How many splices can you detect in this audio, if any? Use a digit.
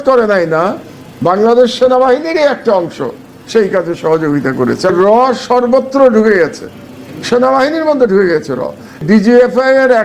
2